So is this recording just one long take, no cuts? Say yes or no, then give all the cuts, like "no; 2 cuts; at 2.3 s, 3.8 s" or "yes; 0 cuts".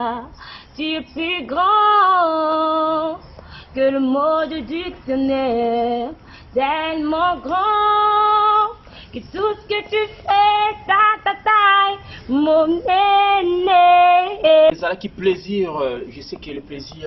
no; 1 cut; at 14.7 s